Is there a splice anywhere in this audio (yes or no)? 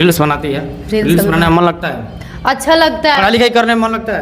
no